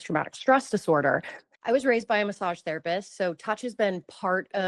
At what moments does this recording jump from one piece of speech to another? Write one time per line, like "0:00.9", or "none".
0:01.5